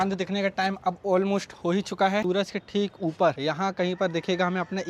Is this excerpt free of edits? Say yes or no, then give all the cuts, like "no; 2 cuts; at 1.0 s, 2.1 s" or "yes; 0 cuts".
no; 1 cut; at 2.2 s